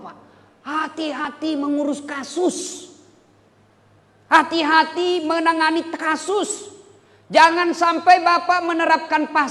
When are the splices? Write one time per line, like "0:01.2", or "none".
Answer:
0:01.2